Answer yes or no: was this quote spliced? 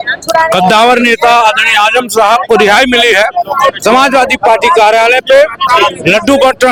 no